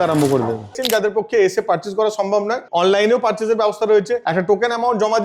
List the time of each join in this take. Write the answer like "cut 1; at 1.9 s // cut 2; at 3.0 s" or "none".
cut 1; at 0.8 s // cut 2; at 2.6 s // cut 3; at 4.2 s